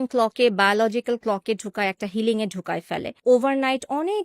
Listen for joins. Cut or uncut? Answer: cut